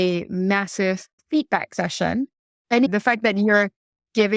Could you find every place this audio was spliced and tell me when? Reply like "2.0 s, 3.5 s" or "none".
1.2 s, 2.9 s